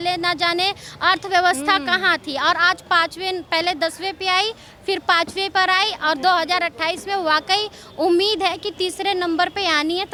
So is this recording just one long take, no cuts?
yes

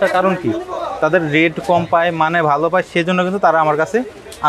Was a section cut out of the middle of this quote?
no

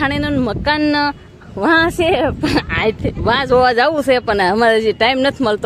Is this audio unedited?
yes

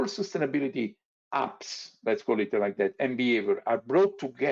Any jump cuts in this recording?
no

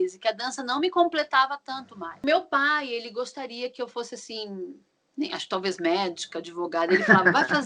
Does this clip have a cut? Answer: yes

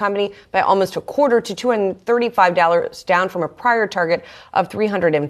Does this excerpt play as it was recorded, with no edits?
yes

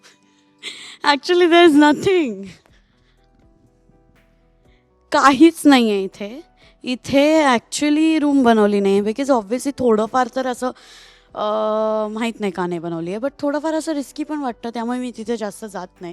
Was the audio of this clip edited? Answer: no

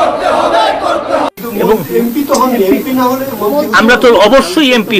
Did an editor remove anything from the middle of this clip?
yes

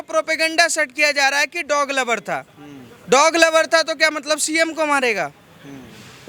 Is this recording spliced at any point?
no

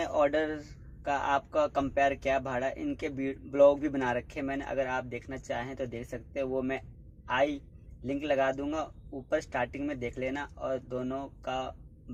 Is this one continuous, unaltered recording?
yes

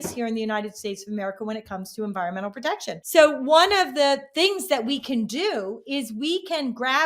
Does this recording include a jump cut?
yes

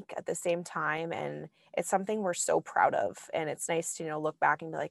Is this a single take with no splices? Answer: yes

